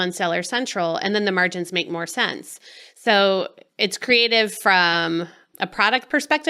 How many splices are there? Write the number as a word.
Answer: one